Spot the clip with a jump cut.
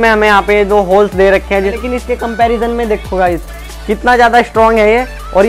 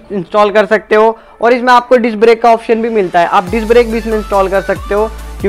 first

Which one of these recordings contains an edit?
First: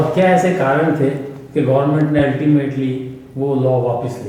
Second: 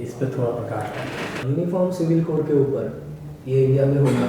second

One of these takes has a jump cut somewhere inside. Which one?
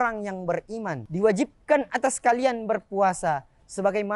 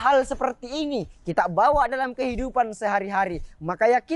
first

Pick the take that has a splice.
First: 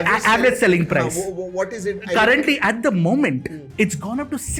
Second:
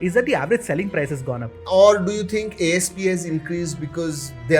second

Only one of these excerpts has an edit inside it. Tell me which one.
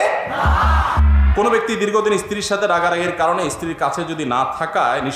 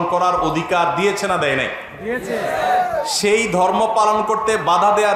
first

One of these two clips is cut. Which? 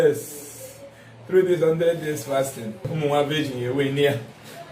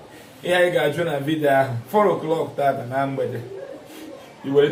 first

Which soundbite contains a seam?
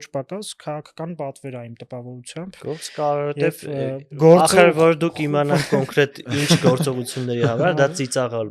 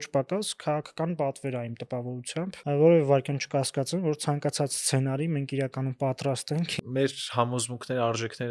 second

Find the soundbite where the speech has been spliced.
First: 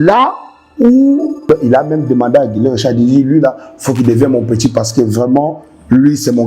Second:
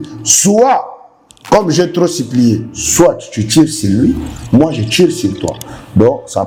first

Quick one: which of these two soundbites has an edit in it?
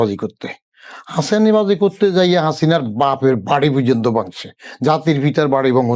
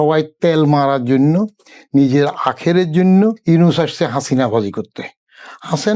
second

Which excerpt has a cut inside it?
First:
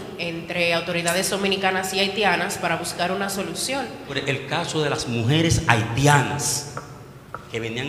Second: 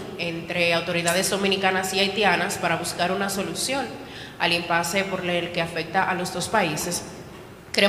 first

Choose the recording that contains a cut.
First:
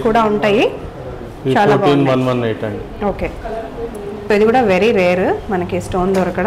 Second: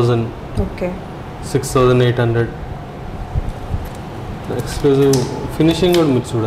first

